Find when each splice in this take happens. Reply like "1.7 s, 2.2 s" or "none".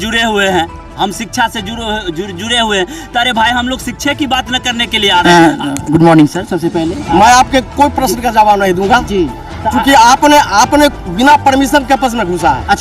5.2 s